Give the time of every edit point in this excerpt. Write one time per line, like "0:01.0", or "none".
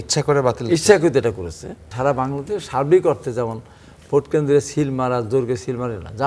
0:01.8

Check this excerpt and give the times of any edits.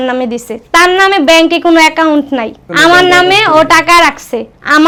none

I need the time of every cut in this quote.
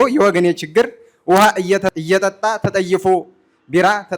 0:01.9

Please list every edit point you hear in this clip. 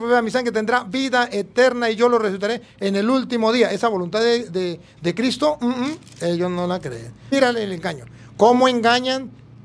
0:07.3

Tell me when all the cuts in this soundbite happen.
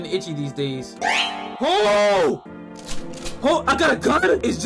0:01.0

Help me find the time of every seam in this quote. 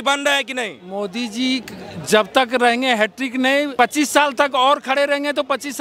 0:03.7

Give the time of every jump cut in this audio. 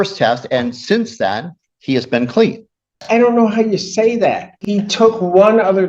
0:03.0
0:04.5

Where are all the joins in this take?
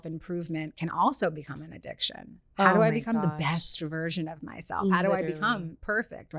none

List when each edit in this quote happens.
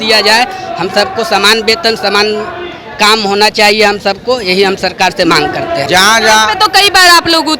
0:05.9

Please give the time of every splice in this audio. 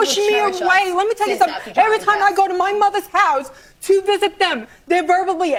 none

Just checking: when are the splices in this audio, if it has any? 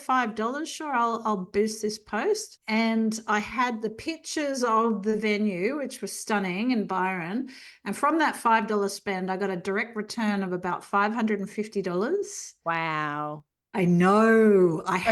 0:02.5

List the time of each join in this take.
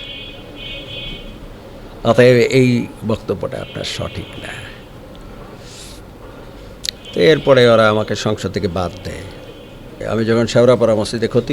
0:10.0

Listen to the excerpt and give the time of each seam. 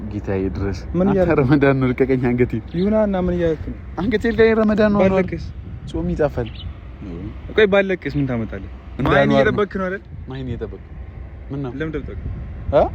0:09.0

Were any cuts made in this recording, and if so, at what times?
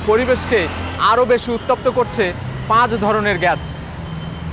none

